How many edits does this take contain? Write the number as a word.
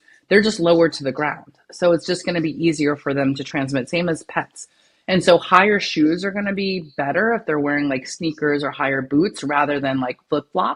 zero